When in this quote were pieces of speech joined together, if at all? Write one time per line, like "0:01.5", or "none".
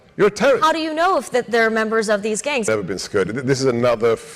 0:02.7